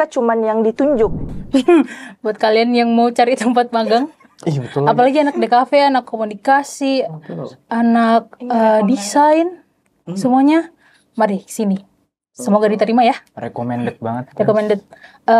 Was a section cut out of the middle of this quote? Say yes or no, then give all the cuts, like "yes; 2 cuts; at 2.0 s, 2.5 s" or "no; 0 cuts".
yes; 1 cut; at 1.2 s